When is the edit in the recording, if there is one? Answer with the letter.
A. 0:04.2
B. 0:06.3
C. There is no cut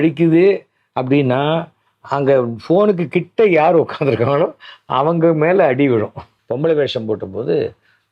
B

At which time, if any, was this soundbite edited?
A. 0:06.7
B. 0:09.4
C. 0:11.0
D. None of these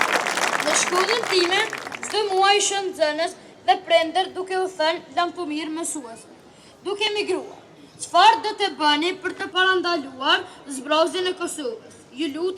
B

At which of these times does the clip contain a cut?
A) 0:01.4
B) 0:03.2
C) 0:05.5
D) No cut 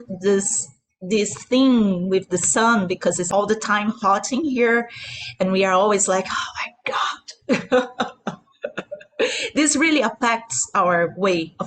B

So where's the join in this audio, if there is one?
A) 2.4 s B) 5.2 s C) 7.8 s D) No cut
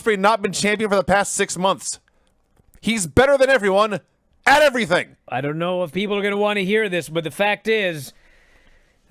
B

